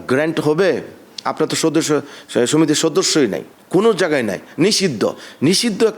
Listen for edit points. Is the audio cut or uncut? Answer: uncut